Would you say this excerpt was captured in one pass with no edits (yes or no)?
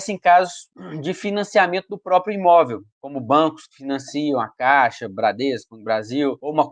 yes